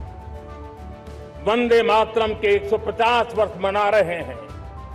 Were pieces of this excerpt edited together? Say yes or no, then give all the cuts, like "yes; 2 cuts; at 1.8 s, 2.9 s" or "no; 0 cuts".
no; 0 cuts